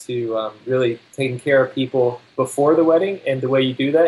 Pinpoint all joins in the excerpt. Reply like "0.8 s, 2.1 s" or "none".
1.1 s, 2.2 s